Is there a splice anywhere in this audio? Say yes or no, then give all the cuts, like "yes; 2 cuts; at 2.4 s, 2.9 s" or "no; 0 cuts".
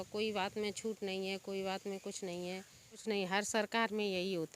yes; 1 cut; at 3.0 s